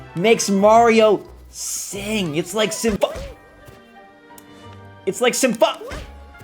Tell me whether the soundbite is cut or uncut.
cut